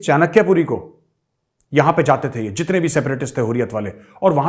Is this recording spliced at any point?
no; 0 cuts

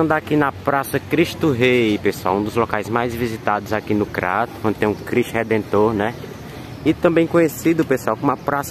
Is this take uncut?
yes; 0 cuts

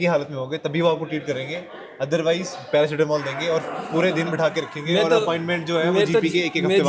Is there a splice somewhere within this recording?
no; 0 cuts

